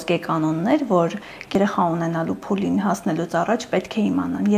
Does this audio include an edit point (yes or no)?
yes